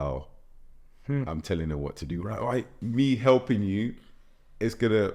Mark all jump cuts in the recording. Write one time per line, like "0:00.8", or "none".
0:02.8